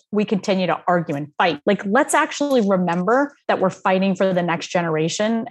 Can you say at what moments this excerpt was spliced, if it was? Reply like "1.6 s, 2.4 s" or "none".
1.6 s, 3.4 s